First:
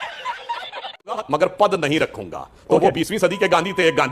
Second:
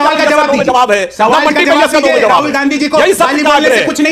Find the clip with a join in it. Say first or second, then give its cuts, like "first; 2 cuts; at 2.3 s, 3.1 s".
first; 1 cut; at 1.2 s